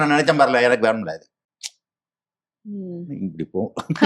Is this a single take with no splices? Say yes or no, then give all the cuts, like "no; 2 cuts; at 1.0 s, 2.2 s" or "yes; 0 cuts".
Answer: yes; 0 cuts